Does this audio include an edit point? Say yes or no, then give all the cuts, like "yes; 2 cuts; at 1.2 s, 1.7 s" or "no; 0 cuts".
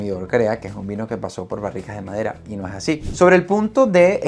yes; 1 cut; at 3.0 s